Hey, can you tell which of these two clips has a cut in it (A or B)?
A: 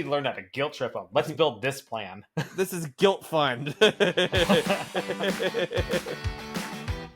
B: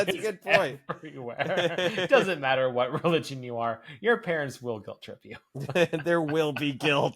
A